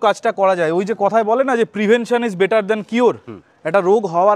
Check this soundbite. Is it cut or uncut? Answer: uncut